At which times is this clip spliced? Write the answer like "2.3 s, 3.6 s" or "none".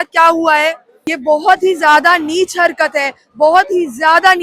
1.1 s